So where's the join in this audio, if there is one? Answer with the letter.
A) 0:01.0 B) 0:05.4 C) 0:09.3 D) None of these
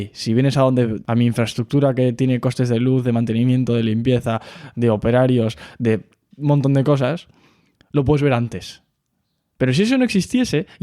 A